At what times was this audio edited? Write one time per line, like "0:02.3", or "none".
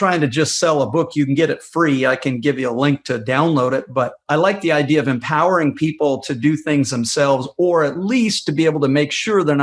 none